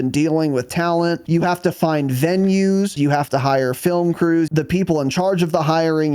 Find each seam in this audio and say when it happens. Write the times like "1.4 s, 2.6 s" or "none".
1.2 s, 3.0 s, 4.5 s